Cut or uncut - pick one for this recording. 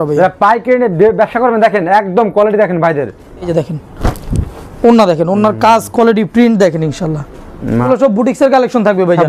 cut